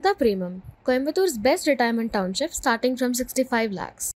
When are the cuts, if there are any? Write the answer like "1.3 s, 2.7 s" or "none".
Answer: none

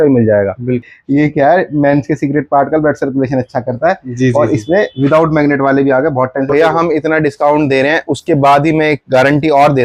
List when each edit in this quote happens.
0.9 s, 6.5 s

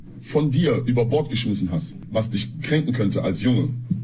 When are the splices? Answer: 2.0 s

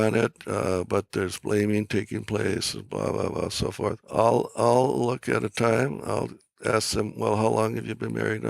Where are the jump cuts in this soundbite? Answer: 4.0 s

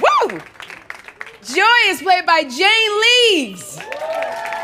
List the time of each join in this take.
2.5 s

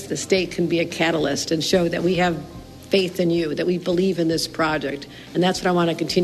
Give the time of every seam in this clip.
none

